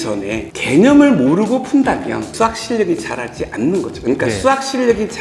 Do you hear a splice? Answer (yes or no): yes